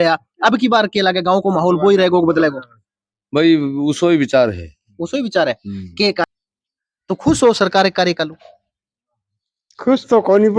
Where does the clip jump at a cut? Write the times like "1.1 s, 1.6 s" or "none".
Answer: 6.2 s